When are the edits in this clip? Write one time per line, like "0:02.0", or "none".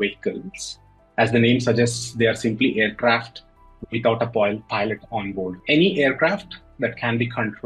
none